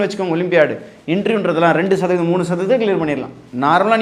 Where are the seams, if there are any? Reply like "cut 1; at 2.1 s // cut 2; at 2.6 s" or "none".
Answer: none